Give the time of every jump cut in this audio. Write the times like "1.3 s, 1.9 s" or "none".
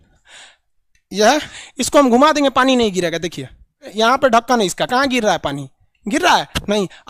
1.6 s, 3.9 s